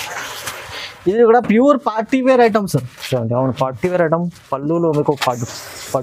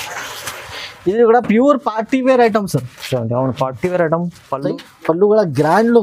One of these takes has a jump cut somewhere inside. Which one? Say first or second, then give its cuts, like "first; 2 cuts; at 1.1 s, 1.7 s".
second; 1 cut; at 4.7 s